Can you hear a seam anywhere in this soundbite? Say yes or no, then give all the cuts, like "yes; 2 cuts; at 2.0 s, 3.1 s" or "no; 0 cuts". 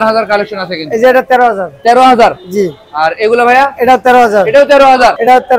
no; 0 cuts